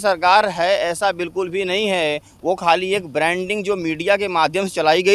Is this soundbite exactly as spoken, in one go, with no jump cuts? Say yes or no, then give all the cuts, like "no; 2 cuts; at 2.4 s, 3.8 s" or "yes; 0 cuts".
yes; 0 cuts